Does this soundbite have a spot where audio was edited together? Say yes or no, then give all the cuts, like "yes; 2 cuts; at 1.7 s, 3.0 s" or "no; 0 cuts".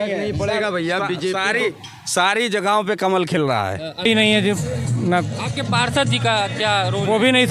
yes; 1 cut; at 4.1 s